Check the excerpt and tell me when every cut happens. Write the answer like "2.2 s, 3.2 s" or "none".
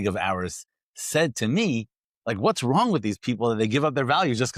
none